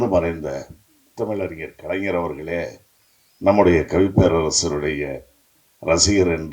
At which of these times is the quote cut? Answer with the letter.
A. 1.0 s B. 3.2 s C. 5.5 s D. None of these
A